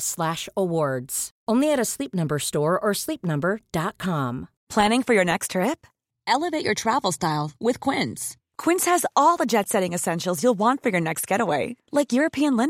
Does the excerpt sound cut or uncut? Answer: cut